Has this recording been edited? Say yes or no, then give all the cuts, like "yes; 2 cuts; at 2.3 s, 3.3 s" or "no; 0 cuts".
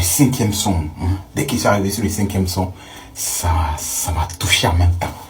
no; 0 cuts